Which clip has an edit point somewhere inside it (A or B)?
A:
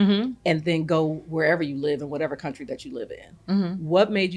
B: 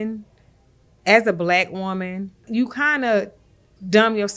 B